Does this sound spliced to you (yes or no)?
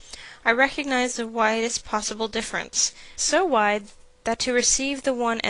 no